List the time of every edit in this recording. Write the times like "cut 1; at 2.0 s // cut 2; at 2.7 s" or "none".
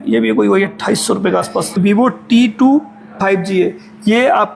cut 1; at 1.8 s